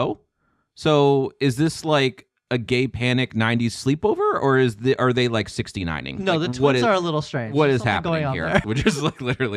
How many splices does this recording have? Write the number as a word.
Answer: one